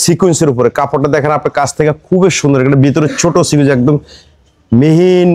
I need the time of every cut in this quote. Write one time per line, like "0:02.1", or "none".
none

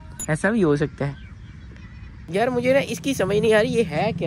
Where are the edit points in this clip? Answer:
none

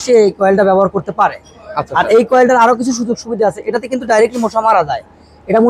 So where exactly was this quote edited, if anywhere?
none

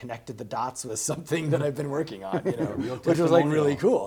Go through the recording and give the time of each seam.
none

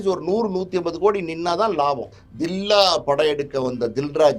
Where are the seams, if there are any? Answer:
0:02.2

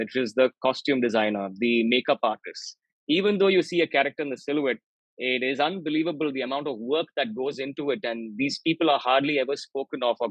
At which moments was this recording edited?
none

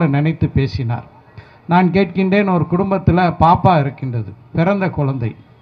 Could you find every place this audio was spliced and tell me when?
none

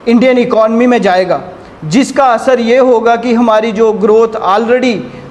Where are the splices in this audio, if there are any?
none

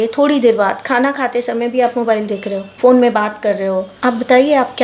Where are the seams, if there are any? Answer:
0:02.6
0:03.9

